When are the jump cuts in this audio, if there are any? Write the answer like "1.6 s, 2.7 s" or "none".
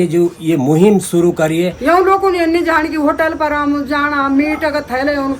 1.7 s